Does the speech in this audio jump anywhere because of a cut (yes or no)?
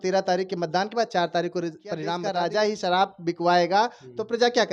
yes